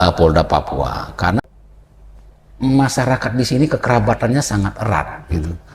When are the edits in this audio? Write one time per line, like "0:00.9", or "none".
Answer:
0:01.3